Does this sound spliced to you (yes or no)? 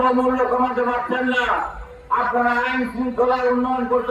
no